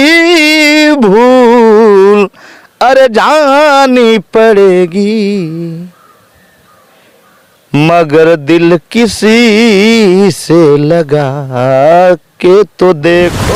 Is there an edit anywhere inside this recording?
no; 0 cuts

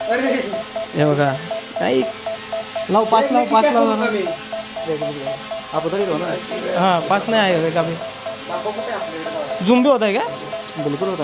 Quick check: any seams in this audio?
no; 0 cuts

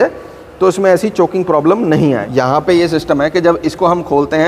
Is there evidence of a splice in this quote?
yes; 1 cut; at 2.3 s

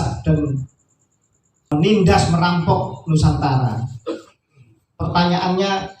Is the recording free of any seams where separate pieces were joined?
no; 1 cut; at 1.7 s

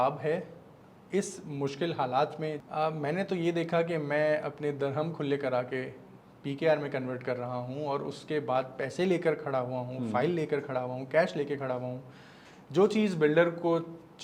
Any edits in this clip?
yes; 1 cut; at 2.6 s

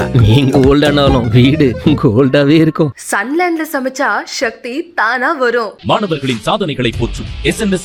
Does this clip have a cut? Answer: no; 0 cuts

